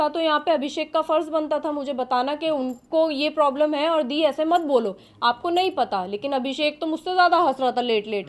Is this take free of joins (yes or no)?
yes